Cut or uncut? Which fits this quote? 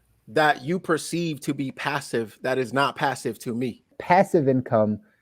cut